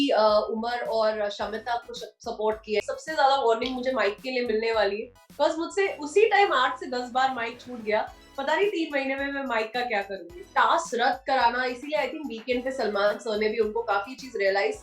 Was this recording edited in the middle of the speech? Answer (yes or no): yes